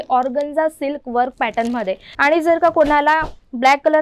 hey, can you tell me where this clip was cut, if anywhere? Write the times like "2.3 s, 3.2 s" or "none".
2.1 s